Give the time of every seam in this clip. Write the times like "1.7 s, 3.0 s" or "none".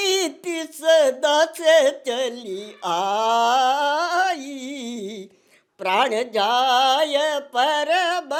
none